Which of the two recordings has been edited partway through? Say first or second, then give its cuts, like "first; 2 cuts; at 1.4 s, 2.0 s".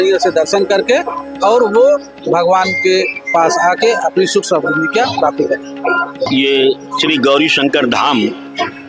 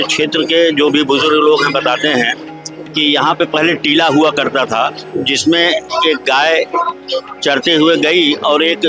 first; 1 cut; at 6.2 s